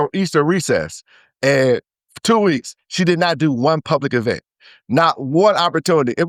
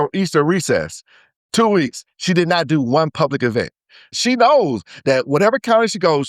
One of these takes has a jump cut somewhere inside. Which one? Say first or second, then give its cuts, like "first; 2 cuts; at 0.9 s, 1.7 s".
second; 2 cuts; at 1.2 s, 4.2 s